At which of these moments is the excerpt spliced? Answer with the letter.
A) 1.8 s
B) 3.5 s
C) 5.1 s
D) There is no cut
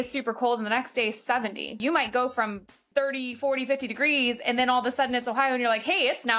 A